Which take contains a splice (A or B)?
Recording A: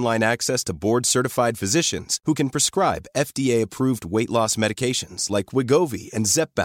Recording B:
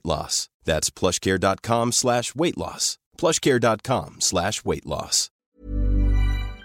B